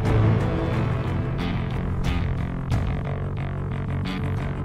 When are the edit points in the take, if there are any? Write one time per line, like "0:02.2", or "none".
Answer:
none